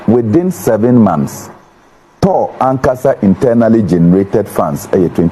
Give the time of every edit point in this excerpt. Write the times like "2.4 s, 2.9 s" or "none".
none